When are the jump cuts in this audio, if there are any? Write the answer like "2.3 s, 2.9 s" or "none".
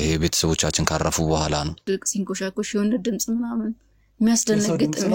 1.9 s

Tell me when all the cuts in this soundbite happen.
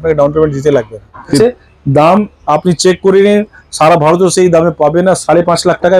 1.4 s

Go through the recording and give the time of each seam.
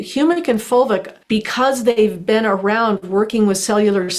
1.1 s

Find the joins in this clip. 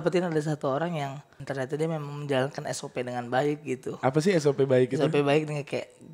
1.3 s

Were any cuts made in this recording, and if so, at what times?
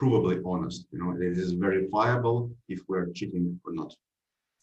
none

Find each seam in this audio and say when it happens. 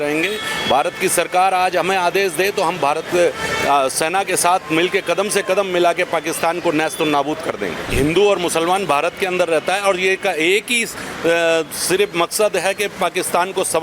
7.8 s

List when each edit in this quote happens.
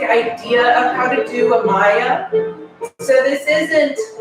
none

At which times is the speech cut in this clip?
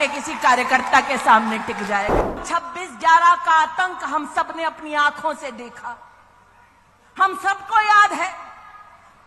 2.4 s

